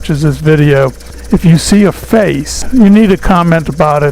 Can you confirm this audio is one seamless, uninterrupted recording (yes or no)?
no